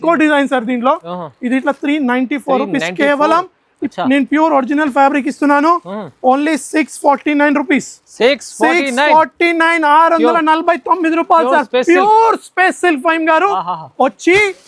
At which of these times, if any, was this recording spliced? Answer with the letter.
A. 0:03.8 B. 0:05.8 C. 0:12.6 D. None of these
A